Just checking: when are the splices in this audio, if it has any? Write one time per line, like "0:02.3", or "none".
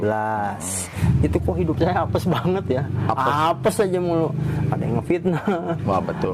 0:00.9